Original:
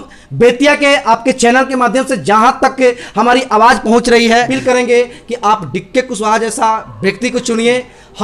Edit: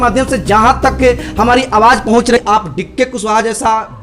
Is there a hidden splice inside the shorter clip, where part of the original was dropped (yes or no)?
yes